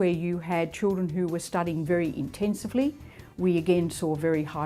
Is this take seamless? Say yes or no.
yes